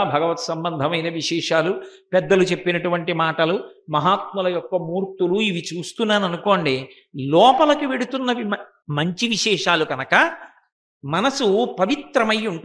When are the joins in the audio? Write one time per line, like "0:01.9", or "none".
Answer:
0:08.8